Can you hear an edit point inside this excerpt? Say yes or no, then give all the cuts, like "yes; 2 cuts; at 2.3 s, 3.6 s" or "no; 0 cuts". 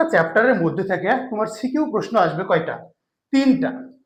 no; 0 cuts